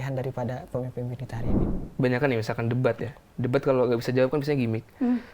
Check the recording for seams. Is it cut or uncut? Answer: cut